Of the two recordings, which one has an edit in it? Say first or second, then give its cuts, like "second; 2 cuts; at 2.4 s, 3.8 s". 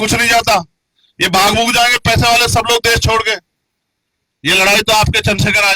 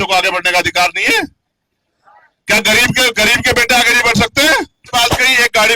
second; 1 cut; at 4.8 s